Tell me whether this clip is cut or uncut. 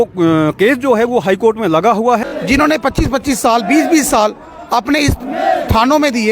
cut